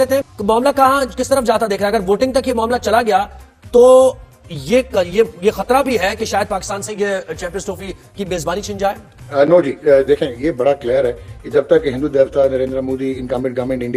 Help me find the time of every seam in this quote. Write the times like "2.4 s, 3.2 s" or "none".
9.1 s